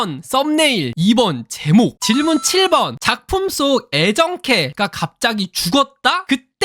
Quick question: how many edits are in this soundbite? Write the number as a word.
two